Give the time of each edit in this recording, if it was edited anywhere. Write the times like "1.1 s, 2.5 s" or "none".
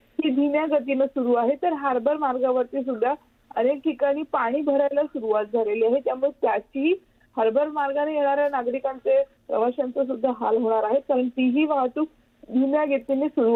none